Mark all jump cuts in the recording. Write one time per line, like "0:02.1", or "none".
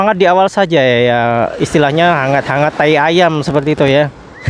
none